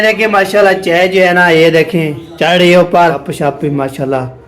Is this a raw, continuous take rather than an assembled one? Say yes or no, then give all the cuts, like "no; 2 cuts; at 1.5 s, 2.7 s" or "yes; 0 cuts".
no; 1 cut; at 3.3 s